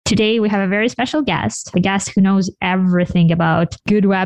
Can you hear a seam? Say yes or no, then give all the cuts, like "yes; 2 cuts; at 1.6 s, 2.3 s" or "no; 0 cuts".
yes; 1 cut; at 1.7 s